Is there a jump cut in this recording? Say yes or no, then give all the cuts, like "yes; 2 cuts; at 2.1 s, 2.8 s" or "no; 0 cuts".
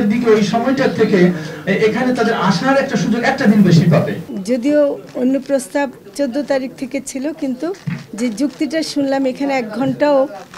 yes; 1 cut; at 4.2 s